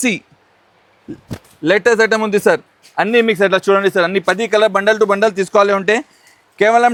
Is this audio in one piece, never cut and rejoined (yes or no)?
yes